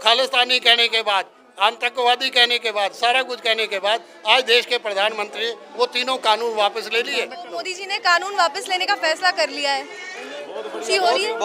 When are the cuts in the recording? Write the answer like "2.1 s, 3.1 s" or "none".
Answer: 7.8 s